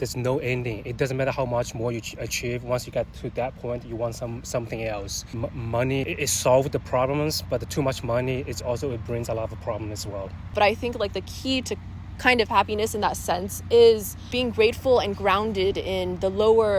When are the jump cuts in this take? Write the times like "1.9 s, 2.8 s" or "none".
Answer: 5.2 s, 6.1 s, 10.5 s, 14.3 s